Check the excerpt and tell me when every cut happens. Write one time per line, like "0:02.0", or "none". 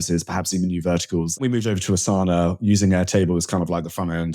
0:01.4